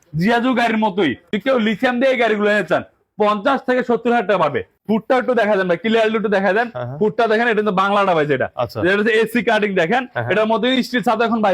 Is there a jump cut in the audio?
yes; 2 cuts; at 1.2 s, 4.7 s

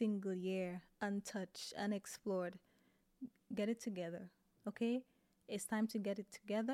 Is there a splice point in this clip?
no; 0 cuts

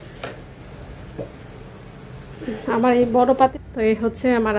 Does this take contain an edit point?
yes; 1 cut; at 3.5 s

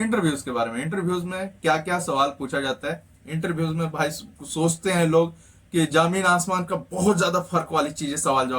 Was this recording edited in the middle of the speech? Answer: no; 0 cuts

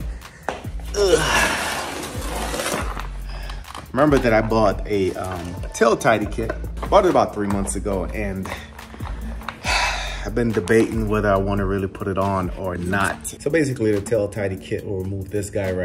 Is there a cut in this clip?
no; 0 cuts

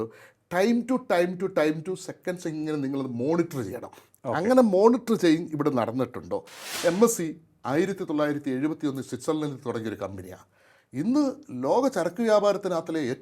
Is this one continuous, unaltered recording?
no; 1 cut; at 6.6 s

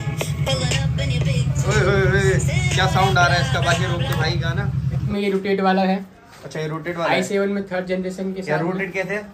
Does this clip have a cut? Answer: yes; 1 cut; at 5.0 s

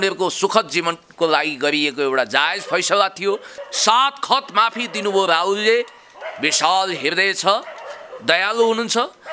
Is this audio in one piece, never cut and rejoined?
no; 1 cut; at 3.5 s

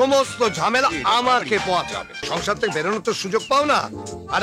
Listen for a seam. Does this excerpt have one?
yes; 1 cut; at 2.2 s

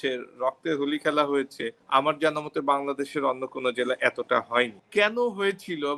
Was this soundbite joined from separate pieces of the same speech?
no; 0 cuts

